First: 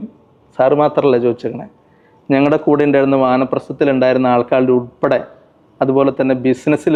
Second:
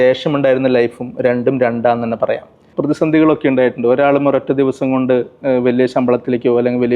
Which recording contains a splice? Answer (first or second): second